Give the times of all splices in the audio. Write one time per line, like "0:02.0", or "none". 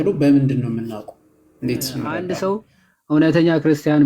0:02.3